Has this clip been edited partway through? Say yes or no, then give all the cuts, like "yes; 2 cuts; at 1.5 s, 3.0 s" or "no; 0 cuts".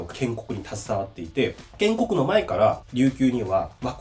yes; 2 cuts; at 1.6 s, 2.8 s